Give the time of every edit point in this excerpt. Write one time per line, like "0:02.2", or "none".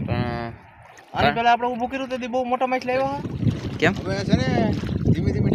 0:03.3